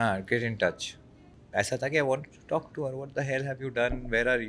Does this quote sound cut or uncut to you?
cut